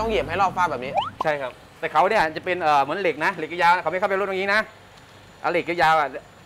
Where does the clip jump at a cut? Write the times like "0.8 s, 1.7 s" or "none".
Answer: none